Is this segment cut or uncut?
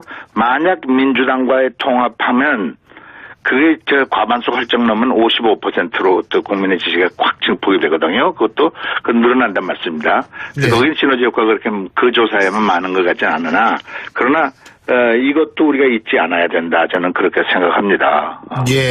cut